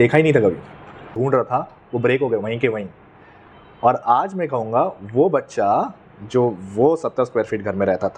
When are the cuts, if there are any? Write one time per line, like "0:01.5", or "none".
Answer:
0:01.1